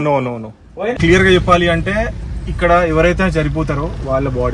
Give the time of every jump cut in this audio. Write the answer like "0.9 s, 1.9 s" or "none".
0.9 s